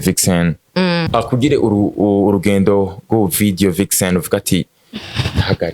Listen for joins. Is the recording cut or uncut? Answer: cut